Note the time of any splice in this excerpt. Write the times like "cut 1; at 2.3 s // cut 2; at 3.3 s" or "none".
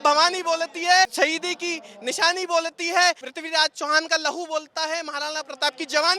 cut 1; at 1.1 s // cut 2; at 3.3 s